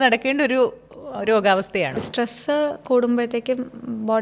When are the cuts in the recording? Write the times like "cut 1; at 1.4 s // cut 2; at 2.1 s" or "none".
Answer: cut 1; at 2.1 s